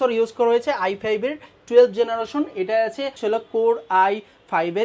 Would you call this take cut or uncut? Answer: cut